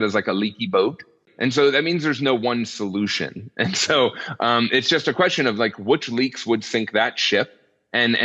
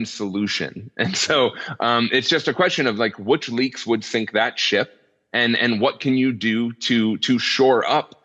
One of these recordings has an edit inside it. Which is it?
first; 1 cut; at 1.3 s

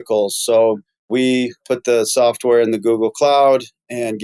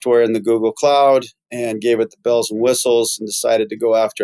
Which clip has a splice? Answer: first; 1 cut; at 1.4 s

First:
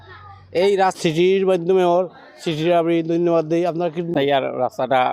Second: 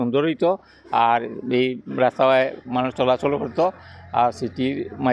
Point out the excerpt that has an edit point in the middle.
first; 2 cuts; at 1.0 s, 4.0 s

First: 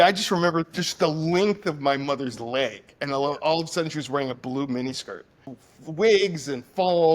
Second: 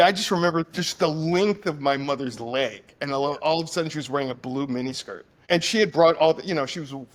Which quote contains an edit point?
first; 1 cut; at 5.3 s

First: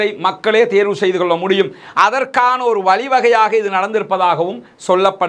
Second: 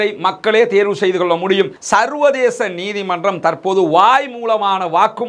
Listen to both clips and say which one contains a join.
second; 1 cut; at 1.8 s

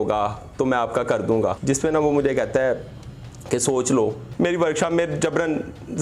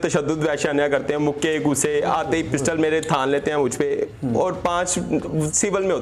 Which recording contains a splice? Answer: first; 2 cuts; at 1.5 s, 4.2 s

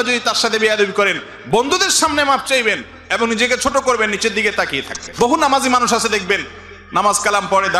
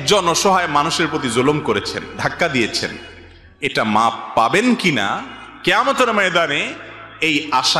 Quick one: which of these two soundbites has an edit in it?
first; 1 cut; at 5.1 s

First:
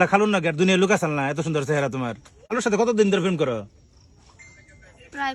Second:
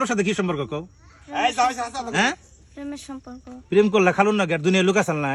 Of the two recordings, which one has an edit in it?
first; 1 cut; at 2.5 s

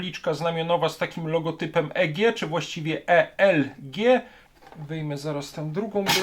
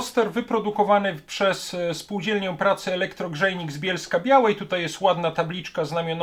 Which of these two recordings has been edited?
first; 1 cut; at 4.4 s

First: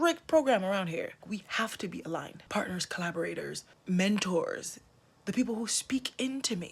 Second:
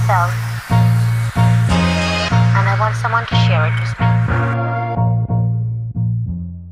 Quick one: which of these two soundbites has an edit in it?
first; 3 cuts; at 1.2 s, 2.4 s, 3.7 s

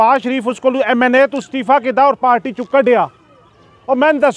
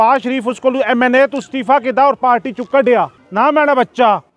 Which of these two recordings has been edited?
second; 1 cut; at 3.2 s

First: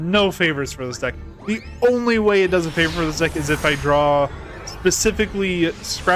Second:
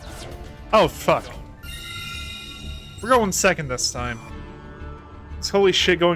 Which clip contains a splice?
second; 1 cut; at 1.6 s

